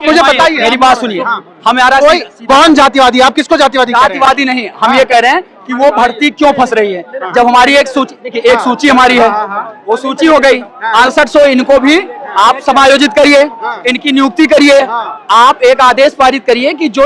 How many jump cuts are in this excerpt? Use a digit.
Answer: 0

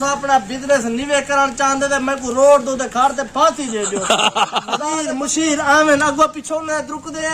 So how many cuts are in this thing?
1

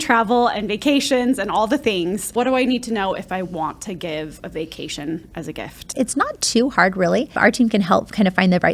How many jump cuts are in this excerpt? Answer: 3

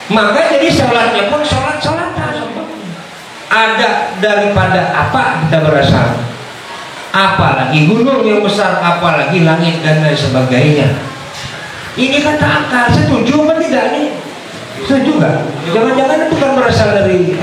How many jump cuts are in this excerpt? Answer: 2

